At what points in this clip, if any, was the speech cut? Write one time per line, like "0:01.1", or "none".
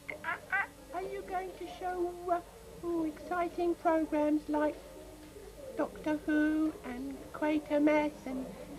0:03.0